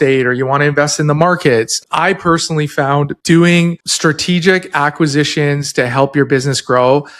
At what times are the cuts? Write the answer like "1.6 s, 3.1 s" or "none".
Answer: 1.8 s, 3.2 s, 3.9 s